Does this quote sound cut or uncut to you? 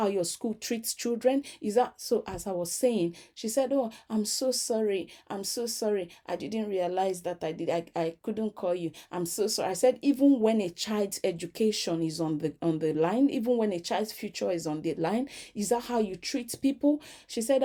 uncut